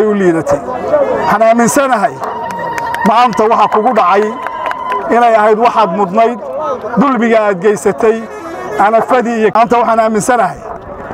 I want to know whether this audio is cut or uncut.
cut